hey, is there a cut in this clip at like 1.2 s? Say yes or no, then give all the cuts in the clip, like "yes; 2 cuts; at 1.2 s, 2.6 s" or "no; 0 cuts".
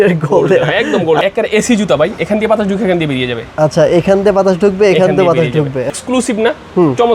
yes; 2 cuts; at 1.2 s, 5.9 s